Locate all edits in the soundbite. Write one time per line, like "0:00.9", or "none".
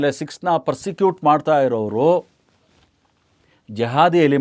none

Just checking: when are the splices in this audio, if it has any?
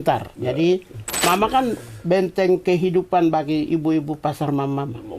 0:01.2

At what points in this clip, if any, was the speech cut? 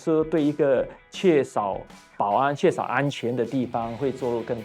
none

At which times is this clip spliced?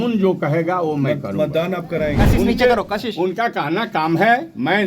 0:02.1

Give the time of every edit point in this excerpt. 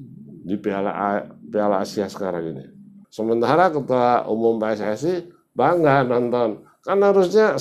0:03.0

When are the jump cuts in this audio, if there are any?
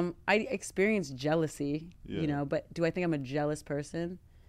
none

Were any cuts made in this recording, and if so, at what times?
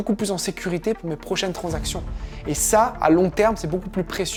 none

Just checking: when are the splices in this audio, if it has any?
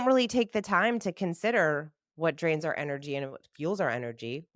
none

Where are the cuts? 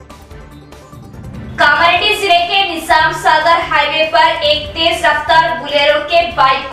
0:01.5

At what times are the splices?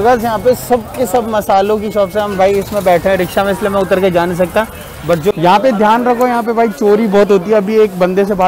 0:05.3

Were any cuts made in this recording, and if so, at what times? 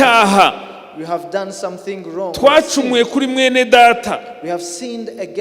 none

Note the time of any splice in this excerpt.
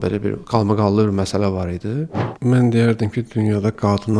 0:02.1

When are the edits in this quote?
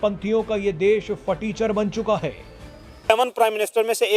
0:03.1

